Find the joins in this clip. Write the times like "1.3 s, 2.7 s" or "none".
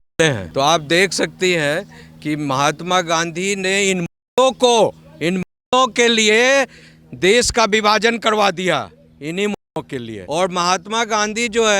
10.2 s